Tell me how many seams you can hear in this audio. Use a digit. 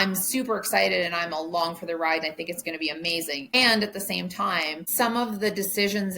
2